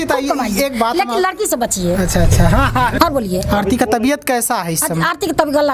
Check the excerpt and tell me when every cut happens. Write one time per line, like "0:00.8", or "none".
0:03.0